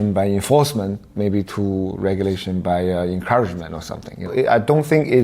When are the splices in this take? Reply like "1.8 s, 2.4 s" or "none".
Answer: 4.3 s